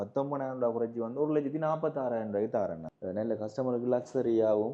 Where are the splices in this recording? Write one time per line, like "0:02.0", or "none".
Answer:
0:02.9